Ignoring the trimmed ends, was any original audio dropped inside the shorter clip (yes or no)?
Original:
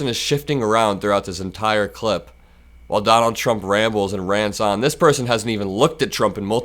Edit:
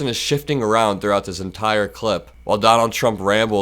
yes